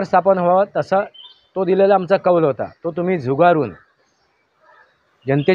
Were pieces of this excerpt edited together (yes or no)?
no